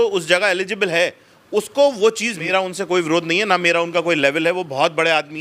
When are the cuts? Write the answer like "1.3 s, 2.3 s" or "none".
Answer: 2.4 s